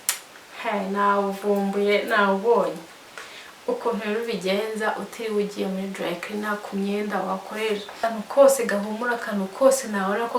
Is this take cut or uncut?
cut